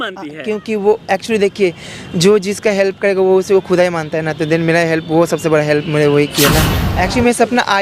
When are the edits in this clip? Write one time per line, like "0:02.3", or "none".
0:06.7